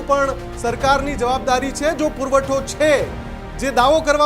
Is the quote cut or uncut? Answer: uncut